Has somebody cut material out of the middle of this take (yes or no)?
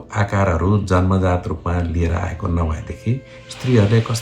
no